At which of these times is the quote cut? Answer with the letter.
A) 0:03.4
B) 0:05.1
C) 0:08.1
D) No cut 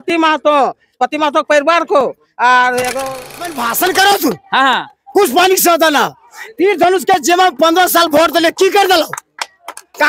A